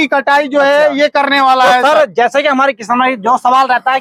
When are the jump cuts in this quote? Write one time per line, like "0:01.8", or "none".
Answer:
none